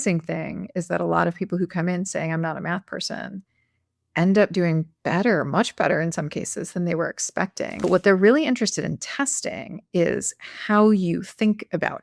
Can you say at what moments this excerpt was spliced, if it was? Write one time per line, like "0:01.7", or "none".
0:07.8